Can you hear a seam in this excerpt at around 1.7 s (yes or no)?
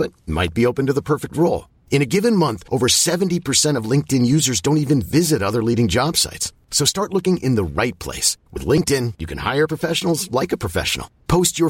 no